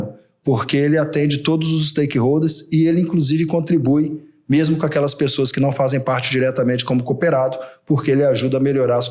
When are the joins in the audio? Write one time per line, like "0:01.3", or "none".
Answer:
none